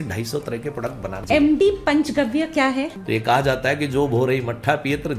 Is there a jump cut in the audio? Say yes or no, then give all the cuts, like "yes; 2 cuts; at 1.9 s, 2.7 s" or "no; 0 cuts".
yes; 2 cuts; at 1.1 s, 3.0 s